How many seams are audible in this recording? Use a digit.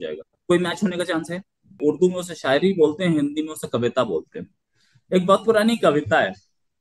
1